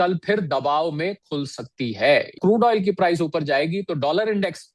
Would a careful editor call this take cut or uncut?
cut